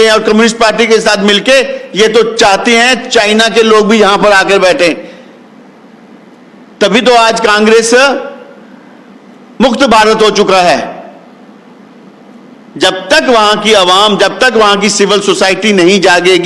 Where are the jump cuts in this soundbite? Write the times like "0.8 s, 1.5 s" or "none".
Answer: none